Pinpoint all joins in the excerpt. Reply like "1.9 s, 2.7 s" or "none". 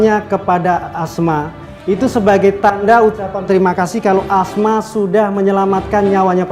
none